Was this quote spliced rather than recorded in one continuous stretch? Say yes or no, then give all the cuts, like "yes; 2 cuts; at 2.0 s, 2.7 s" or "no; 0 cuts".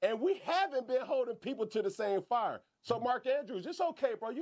no; 0 cuts